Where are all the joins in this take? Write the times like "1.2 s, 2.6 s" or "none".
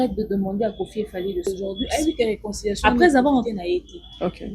1.5 s, 2.9 s, 3.5 s